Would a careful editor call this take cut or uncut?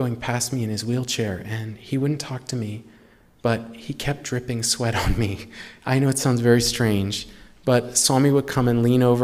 uncut